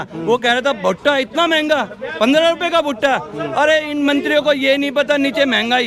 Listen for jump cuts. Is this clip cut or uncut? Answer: uncut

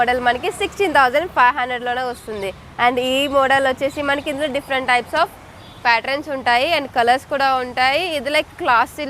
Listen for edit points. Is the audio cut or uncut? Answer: uncut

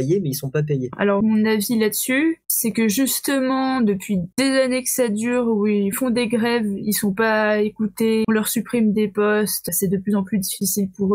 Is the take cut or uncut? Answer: cut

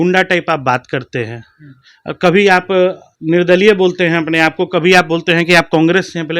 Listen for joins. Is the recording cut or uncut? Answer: cut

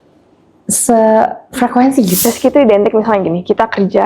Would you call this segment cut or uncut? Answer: cut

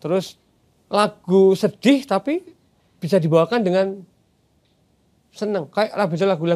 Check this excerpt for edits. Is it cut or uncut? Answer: uncut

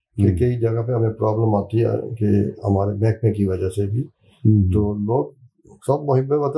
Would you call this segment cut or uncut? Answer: uncut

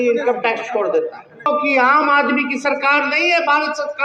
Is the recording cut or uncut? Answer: cut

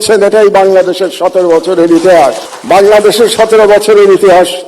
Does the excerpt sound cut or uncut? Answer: cut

